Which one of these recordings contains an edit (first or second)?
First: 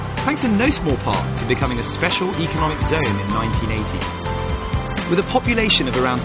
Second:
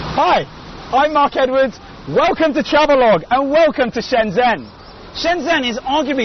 second